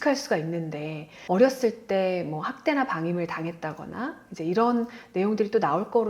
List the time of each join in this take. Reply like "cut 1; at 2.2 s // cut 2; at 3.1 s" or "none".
cut 1; at 1.1 s

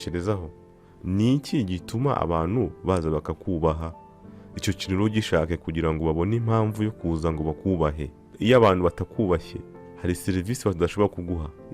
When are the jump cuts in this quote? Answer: cut 1; at 8.3 s

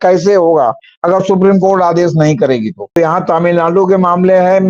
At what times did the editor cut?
cut 1; at 3.0 s

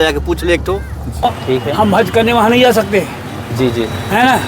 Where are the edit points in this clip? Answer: cut 1; at 1.2 s

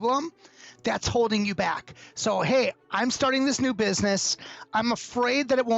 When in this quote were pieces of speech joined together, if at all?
cut 1; at 4.6 s

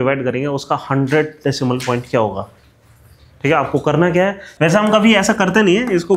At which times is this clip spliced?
cut 1; at 4.5 s

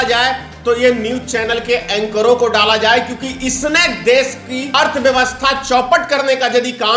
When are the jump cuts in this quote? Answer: cut 1; at 4.7 s

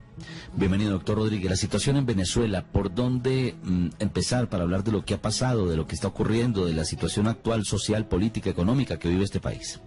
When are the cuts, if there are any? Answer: cut 1; at 3.9 s

